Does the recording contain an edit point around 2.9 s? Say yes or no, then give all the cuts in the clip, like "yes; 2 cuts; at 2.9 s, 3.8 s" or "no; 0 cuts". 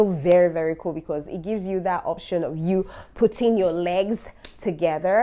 no; 0 cuts